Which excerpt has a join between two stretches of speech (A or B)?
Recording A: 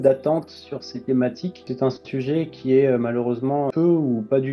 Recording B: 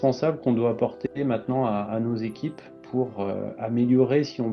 A